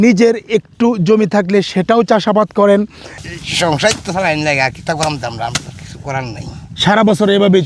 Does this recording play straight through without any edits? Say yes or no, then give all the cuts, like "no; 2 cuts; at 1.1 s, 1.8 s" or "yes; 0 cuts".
no; 1 cut; at 3.0 s